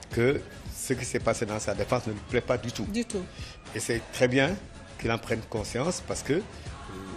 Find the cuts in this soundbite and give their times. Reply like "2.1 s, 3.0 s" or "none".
2.4 s